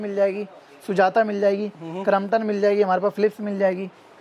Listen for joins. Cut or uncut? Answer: uncut